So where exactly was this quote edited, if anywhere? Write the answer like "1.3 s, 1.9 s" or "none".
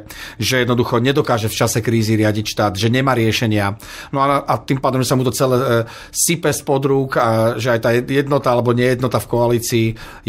none